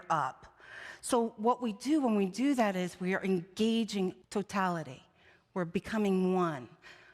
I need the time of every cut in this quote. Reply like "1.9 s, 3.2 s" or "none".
4.2 s